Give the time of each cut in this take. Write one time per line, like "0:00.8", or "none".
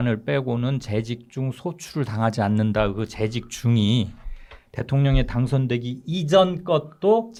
none